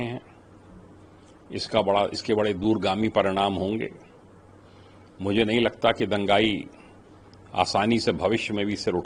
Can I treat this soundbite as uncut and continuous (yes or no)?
yes